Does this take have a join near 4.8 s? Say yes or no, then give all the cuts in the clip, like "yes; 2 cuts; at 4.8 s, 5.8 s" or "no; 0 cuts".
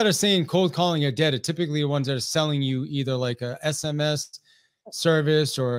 no; 0 cuts